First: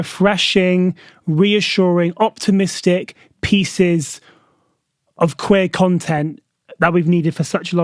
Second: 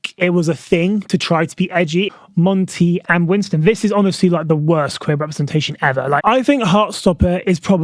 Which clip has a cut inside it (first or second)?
second